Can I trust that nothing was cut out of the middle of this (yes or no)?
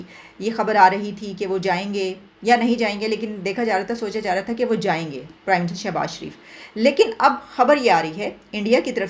yes